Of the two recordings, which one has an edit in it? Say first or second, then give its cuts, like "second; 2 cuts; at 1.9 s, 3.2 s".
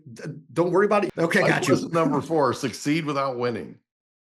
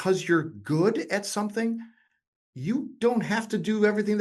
first; 1 cut; at 1.1 s